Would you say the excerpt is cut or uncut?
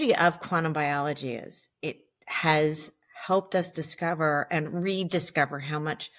cut